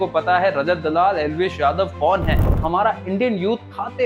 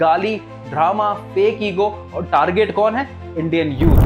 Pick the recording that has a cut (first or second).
first